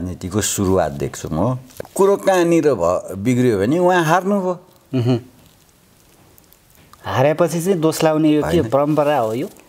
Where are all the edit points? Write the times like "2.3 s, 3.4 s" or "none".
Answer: 1.7 s